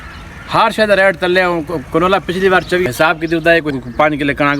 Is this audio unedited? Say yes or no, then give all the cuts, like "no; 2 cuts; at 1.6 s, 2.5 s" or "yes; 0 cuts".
no; 2 cuts; at 2.8 s, 3.7 s